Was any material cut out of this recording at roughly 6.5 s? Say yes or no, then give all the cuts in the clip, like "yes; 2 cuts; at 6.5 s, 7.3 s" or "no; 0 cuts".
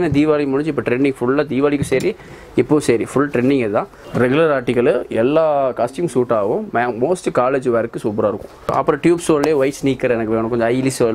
no; 2 cuts; at 4.0 s, 8.7 s